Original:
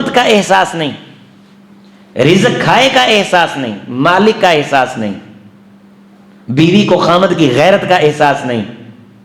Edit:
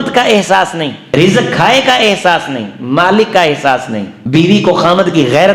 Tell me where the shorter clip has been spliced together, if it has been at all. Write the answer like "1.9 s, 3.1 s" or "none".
1.0 s, 4.1 s